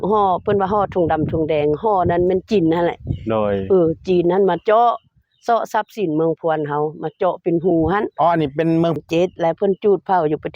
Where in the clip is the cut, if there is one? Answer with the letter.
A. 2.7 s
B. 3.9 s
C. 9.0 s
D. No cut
C